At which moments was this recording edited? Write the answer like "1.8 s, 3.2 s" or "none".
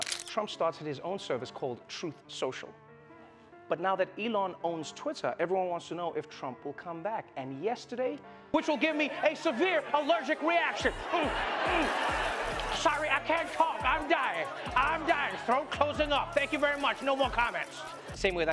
none

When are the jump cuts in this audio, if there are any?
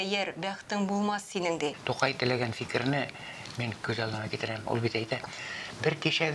1.8 s

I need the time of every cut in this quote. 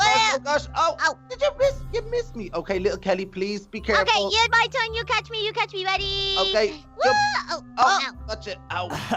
none

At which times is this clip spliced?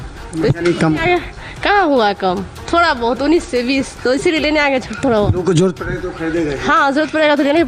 none

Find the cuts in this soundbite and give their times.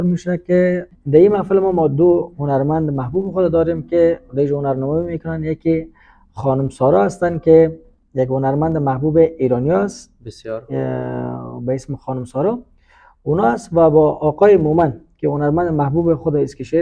0.9 s

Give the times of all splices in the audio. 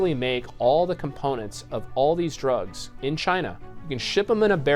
3.7 s

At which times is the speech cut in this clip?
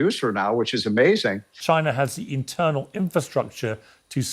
1.5 s

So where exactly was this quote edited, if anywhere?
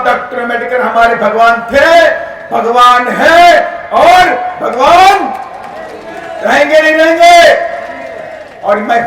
none

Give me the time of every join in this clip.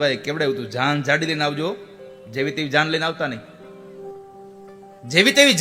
3.9 s

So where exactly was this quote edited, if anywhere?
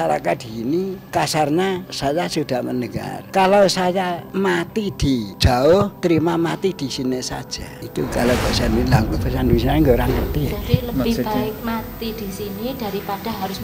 1.0 s, 1.9 s, 3.2 s, 4.2 s, 5.3 s, 5.9 s, 7.8 s

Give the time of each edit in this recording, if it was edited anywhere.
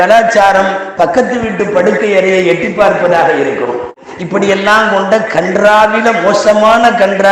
4.0 s

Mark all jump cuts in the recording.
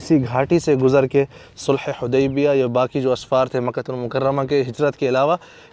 none

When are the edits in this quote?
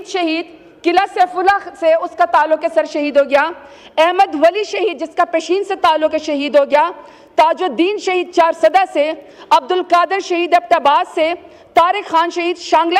none

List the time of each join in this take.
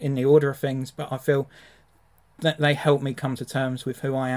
none

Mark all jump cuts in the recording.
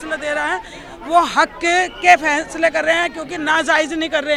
none

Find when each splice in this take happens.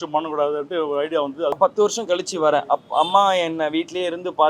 1.6 s

